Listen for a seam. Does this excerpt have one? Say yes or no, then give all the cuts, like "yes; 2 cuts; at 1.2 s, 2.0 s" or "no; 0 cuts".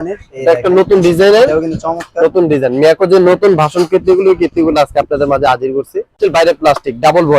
yes; 1 cut; at 6.2 s